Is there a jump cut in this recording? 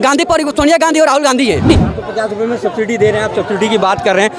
yes; 1 cut; at 1.7 s

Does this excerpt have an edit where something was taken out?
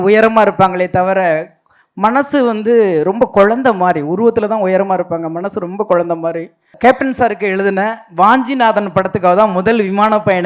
yes; 1 cut; at 6.6 s

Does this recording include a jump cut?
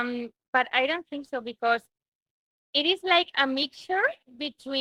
no; 0 cuts

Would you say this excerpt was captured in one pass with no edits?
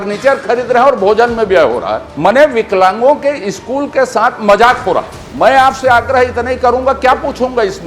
no; 2 cuts; at 2.0 s, 5.2 s

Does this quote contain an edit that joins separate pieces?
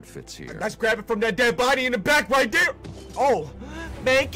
no; 0 cuts

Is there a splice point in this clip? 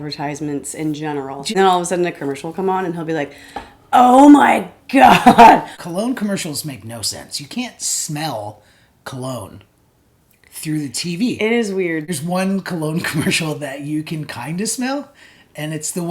yes; 3 cuts; at 1.5 s, 5.7 s, 12.1 s

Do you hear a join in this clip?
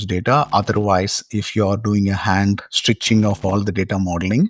no; 0 cuts

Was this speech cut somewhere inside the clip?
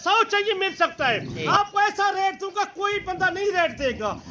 yes; 1 cut; at 1.5 s

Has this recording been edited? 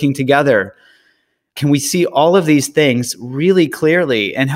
yes; 1 cut; at 1.5 s

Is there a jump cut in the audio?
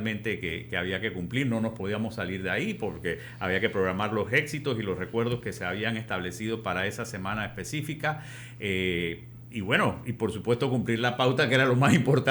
no; 0 cuts

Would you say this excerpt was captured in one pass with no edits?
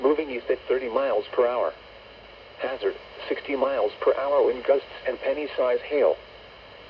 no; 1 cut; at 0.9 s

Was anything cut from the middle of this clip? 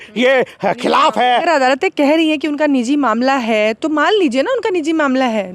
yes; 1 cut; at 1.4 s

